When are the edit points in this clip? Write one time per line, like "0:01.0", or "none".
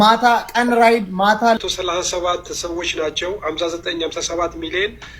0:01.6